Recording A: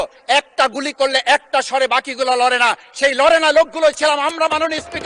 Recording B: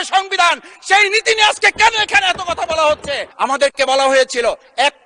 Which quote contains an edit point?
B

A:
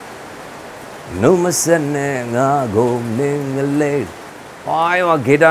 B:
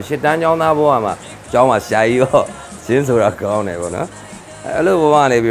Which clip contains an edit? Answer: B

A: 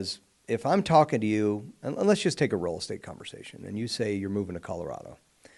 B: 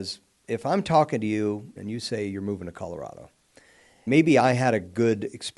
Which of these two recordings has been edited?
B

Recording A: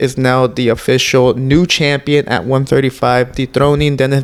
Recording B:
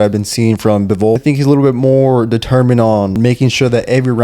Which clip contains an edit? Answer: B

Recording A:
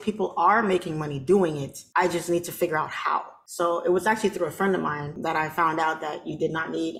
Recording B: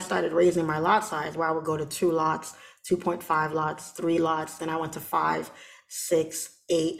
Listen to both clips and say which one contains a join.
A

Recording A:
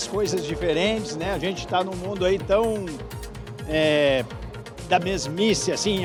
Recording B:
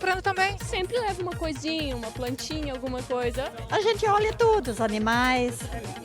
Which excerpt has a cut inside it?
B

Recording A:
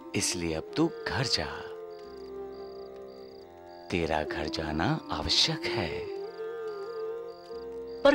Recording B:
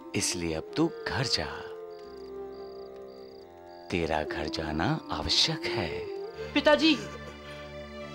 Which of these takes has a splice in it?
B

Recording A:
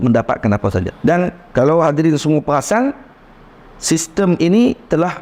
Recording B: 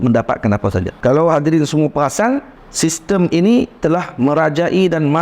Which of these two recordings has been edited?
B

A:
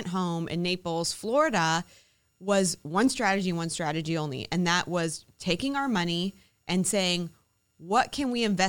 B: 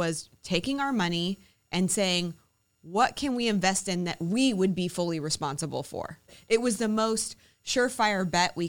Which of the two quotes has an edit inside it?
B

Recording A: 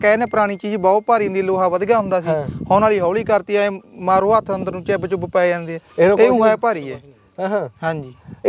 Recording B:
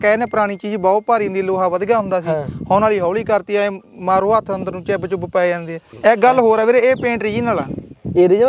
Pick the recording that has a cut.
B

